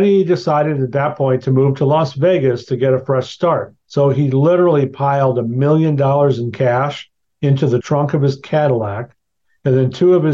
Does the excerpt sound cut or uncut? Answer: cut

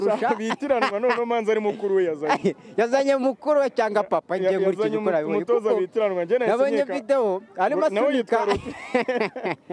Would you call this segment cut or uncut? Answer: uncut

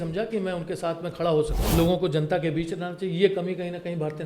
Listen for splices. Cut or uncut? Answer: cut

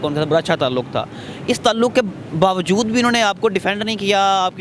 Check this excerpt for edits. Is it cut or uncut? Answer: uncut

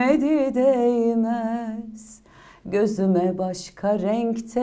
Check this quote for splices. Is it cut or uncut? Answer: uncut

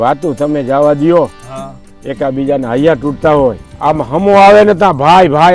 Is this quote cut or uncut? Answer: cut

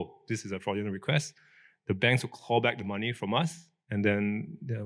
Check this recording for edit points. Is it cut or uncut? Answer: uncut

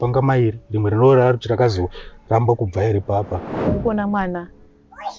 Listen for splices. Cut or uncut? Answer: cut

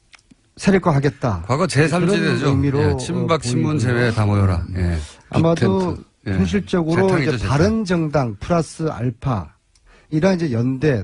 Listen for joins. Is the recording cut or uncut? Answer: uncut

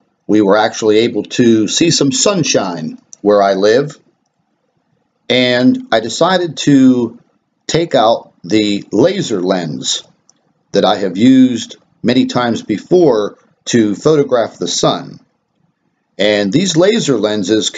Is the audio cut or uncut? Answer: cut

